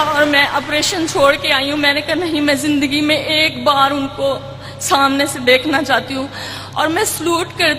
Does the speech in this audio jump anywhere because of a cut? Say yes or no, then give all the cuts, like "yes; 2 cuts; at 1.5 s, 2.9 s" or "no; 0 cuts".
no; 0 cuts